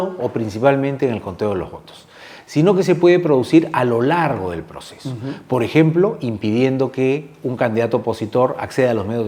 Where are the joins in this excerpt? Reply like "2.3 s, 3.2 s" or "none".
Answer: none